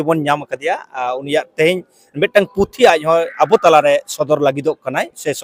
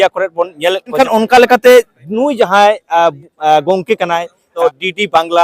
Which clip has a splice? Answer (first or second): second